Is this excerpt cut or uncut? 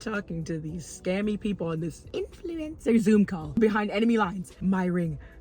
cut